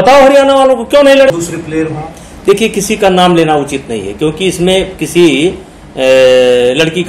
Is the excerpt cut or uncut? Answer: cut